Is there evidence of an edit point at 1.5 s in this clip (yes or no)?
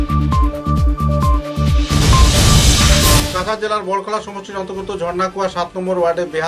no